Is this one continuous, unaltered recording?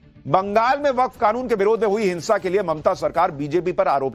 no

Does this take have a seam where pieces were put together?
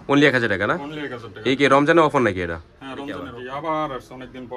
yes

